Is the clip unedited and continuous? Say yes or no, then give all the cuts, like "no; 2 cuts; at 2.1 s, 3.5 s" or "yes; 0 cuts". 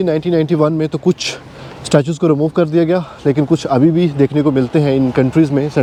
yes; 0 cuts